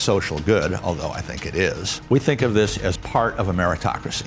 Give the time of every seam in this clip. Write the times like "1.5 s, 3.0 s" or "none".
1.9 s, 3.0 s